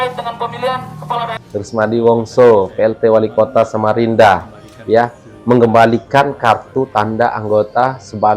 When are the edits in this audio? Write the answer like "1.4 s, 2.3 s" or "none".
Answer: 1.4 s